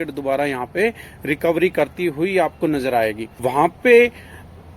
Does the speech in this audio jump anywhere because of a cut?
yes; 1 cut; at 3.3 s

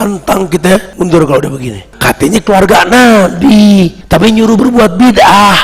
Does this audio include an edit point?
yes; 3 cuts; at 0.9 s, 1.9 s, 4.0 s

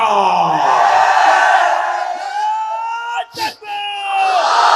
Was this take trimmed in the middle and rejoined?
no; 0 cuts

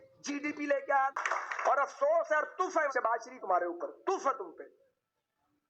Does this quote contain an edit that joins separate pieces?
yes; 1 cut; at 1.2 s

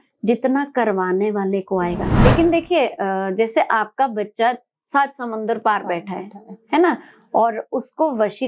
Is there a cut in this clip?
yes; 1 cut; at 2.1 s

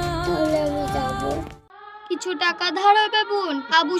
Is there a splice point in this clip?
yes; 1 cut; at 2.0 s

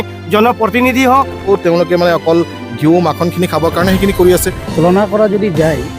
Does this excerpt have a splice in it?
yes; 2 cuts; at 1.5 s, 4.6 s

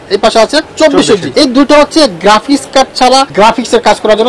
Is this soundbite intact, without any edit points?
no; 2 cuts; at 1.3 s, 3.3 s

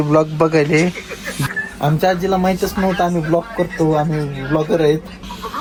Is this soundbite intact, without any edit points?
yes; 0 cuts

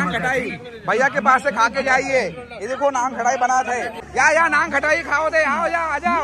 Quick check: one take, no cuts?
no; 1 cut; at 4.0 s

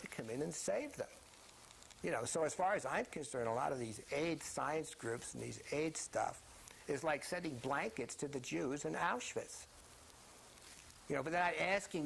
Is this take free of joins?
no; 1 cut; at 5.9 s

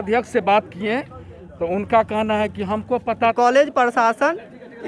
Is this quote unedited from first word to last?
no; 1 cut; at 3.3 s

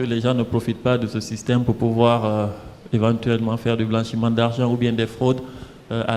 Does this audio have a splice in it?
no; 0 cuts

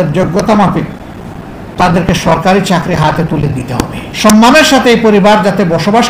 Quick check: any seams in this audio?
yes; 1 cut; at 4.1 s

